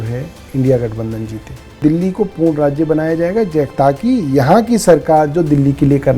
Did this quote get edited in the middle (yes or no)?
yes